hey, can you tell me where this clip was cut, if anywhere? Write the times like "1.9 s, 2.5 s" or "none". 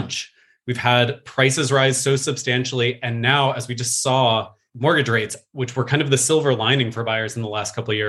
4.6 s